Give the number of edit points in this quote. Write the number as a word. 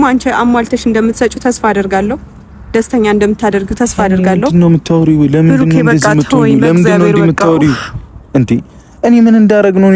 zero